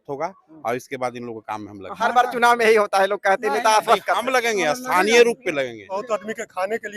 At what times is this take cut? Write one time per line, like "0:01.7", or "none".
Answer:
0:06.0